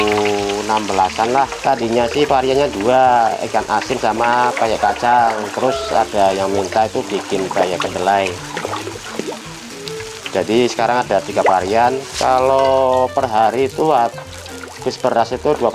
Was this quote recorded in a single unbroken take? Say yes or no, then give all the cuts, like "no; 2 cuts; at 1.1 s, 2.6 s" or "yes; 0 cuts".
no; 2 cuts; at 1.6 s, 12.1 s